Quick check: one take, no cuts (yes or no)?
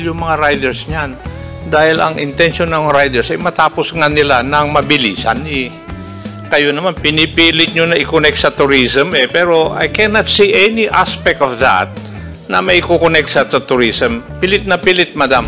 yes